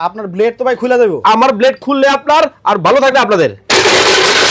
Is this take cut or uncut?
uncut